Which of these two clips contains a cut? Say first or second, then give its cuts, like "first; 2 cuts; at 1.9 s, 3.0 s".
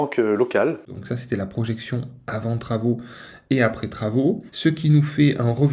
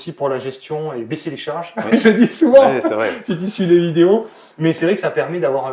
first; 2 cuts; at 1.0 s, 4.5 s